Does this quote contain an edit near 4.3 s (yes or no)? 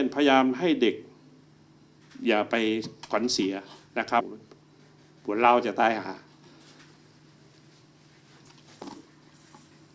yes